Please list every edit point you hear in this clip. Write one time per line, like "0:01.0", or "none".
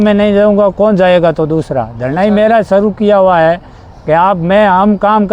none